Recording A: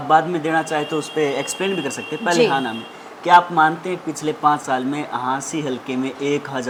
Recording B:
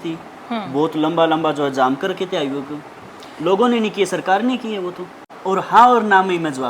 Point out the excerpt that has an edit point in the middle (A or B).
B